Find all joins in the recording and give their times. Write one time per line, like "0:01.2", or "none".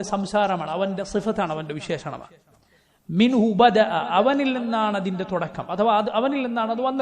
none